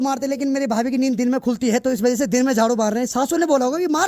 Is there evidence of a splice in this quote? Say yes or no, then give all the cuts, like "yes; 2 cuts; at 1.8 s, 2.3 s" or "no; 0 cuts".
no; 0 cuts